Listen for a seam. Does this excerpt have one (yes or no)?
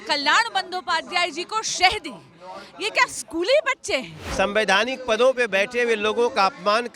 yes